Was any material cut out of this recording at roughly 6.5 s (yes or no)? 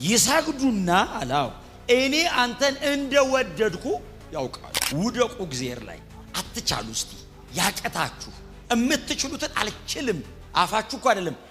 no